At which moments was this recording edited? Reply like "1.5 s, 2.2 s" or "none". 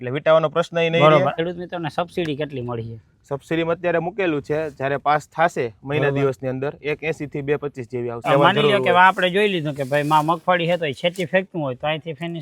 1.3 s, 8.2 s